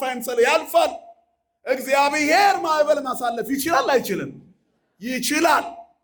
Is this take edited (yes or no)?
no